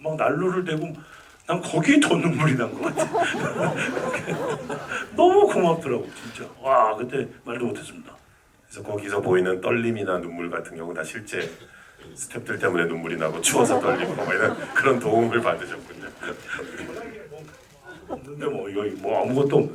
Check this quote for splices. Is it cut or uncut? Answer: uncut